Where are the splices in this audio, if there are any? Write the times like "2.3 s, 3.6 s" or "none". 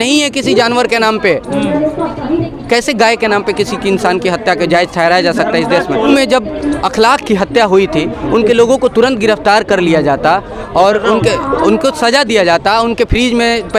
none

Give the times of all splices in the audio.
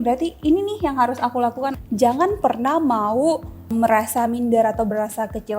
1.8 s, 3.7 s

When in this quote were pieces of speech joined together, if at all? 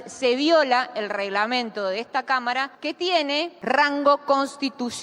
2.7 s, 3.5 s

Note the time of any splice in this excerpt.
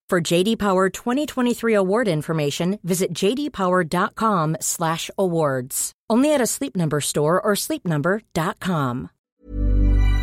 9.3 s

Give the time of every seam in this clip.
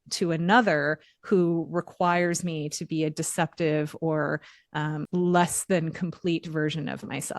5.0 s

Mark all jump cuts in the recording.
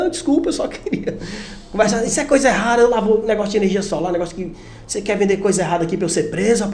none

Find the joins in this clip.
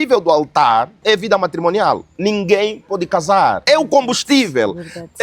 1.0 s, 2.1 s, 3.6 s

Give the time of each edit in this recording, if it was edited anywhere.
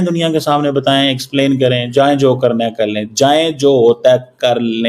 none

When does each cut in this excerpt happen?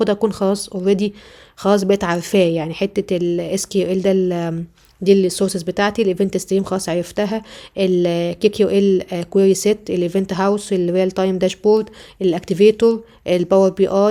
none

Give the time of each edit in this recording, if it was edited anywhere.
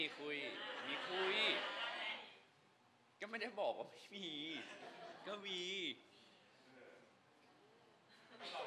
none

